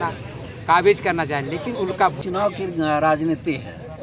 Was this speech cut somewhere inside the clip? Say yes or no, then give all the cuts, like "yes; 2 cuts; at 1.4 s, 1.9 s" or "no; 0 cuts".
yes; 1 cut; at 2.2 s